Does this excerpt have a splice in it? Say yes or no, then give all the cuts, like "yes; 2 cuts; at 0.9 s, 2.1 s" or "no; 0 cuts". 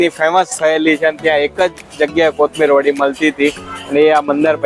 no; 0 cuts